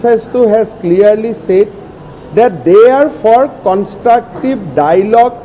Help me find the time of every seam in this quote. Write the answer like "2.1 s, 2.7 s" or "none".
none